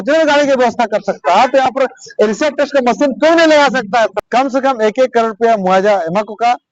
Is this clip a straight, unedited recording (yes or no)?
no